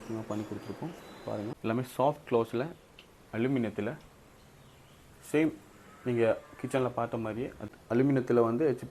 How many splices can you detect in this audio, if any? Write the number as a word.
two